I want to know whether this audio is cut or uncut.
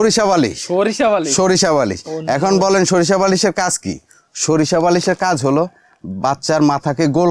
uncut